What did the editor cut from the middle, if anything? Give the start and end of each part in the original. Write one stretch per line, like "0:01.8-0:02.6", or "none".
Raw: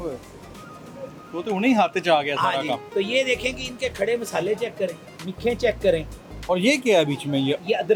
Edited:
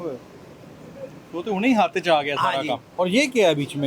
0:02.8-0:06.3